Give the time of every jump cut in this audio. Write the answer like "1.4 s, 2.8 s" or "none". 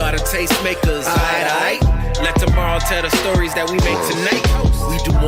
none